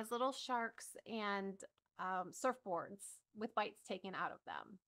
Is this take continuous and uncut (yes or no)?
yes